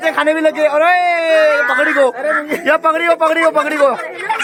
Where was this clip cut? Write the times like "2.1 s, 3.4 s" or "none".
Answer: none